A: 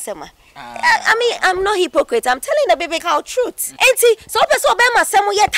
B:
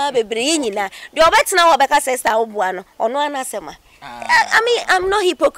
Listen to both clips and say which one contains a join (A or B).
A